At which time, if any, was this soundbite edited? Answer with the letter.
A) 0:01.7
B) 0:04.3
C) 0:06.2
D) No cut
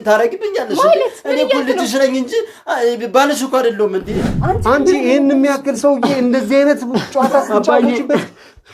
B